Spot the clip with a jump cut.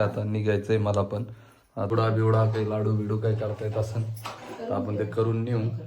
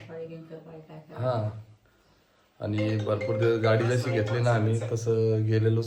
first; 1 cut; at 1.9 s

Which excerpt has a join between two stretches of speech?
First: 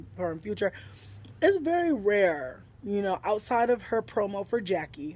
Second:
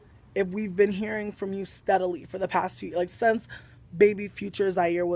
first; 1 cut; at 2.9 s

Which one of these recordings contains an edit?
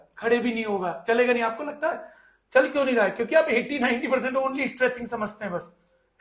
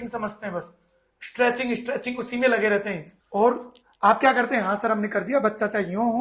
second; 1 cut; at 3.1 s

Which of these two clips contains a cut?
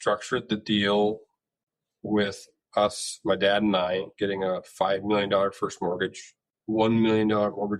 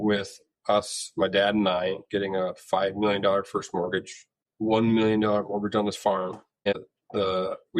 second; 1 cut; at 6.7 s

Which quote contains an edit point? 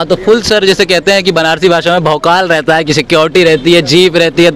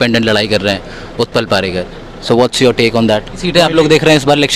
second; 1 cut; at 3.4 s

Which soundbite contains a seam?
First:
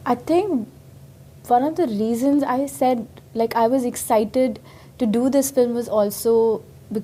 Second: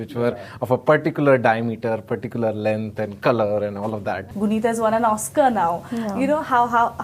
second; 1 cut; at 4.3 s

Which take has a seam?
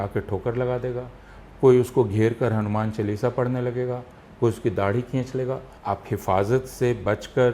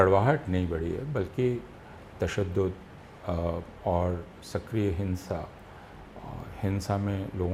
first; 1 cut; at 5.7 s

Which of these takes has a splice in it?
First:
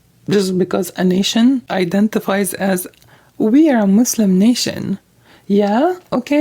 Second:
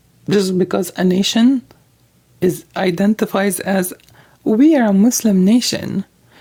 first; 1 cut; at 1.7 s

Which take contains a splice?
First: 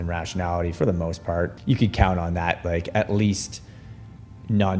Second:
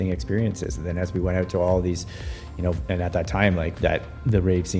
first; 1 cut; at 1.5 s

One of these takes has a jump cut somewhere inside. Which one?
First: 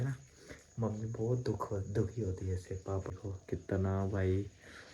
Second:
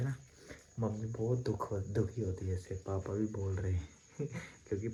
first; 1 cut; at 3.1 s

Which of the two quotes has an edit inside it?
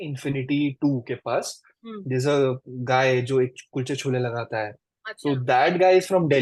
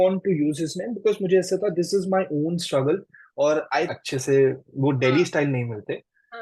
second; 1 cut; at 3.9 s

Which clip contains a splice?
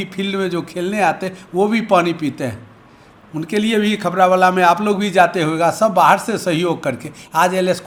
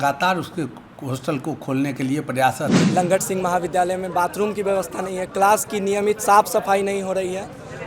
second; 1 cut; at 2.8 s

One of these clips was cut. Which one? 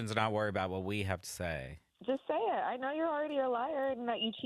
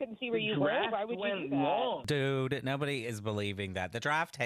second; 1 cut; at 2.0 s

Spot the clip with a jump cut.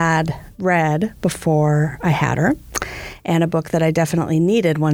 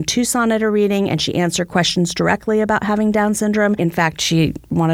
second; 1 cut; at 3.8 s

